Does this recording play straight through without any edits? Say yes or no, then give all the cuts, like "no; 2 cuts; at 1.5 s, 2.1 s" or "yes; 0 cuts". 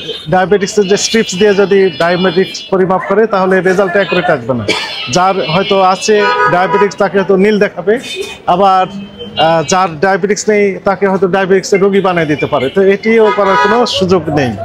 yes; 0 cuts